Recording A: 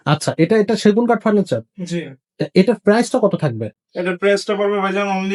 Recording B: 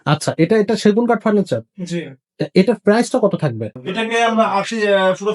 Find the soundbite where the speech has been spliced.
B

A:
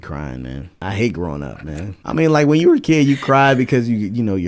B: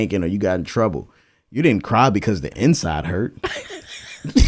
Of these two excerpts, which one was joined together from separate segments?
A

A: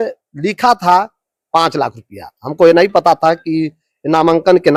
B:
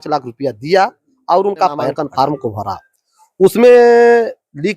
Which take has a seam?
B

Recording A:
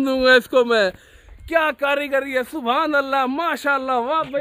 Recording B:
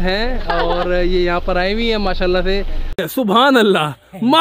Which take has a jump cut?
B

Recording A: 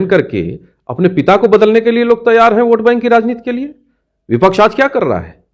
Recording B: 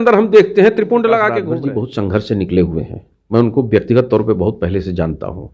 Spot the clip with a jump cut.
B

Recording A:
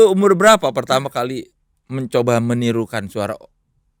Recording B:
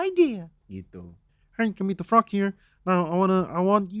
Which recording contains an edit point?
B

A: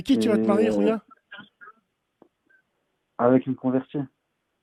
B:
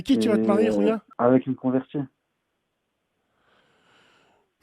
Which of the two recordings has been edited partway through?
B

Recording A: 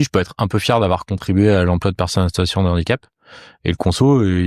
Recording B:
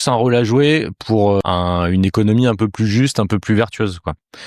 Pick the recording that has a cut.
B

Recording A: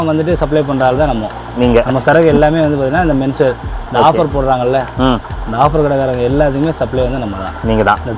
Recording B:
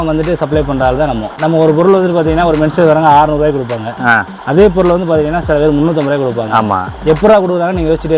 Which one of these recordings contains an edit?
B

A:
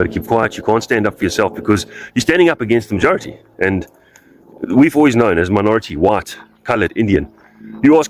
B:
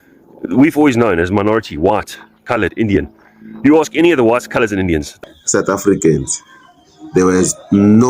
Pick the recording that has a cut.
B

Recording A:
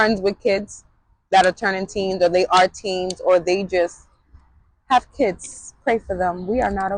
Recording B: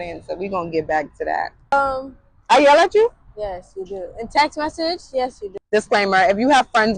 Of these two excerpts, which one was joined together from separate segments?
B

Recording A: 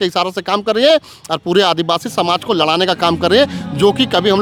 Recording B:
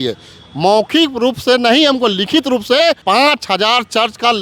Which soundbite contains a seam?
B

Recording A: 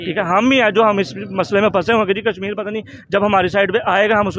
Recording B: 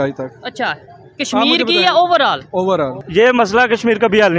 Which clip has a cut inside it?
B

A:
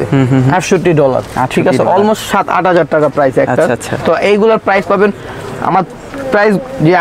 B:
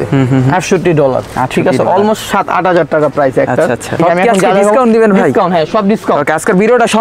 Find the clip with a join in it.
B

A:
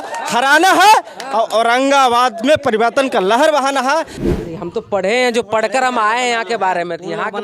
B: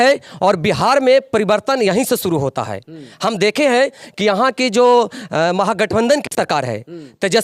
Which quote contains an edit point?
A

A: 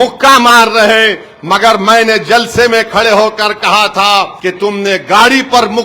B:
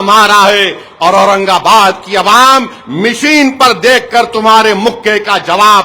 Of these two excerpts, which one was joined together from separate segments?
A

